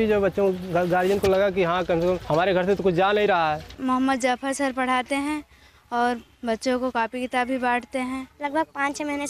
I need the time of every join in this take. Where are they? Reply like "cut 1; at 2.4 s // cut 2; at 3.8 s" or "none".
cut 1; at 2.2 s // cut 2; at 3.7 s // cut 3; at 8.3 s